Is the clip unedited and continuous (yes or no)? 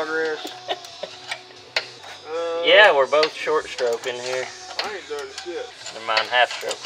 no